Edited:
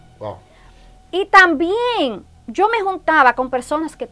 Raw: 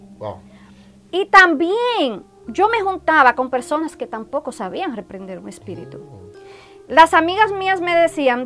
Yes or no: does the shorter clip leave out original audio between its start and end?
no